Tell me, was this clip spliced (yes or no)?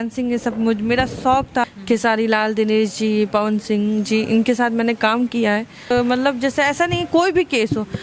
yes